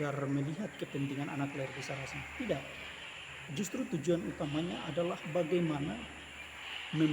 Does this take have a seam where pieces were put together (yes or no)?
yes